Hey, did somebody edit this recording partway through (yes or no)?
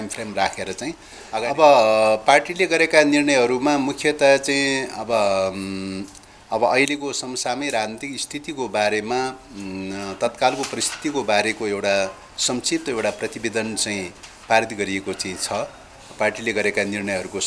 yes